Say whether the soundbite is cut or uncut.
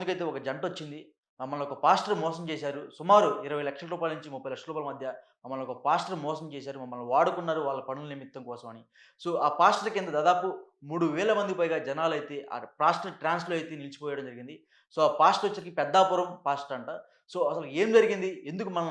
uncut